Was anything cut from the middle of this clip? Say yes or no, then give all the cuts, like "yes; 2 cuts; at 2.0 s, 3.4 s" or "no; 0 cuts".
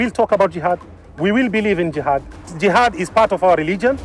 yes; 1 cut; at 2.5 s